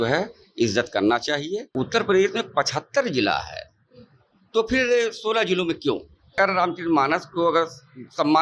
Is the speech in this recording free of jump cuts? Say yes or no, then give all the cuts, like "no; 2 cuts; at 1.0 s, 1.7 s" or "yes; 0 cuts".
no; 2 cuts; at 1.6 s, 6.3 s